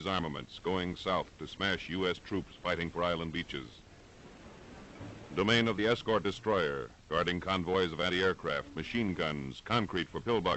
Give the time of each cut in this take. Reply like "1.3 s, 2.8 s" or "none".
9.5 s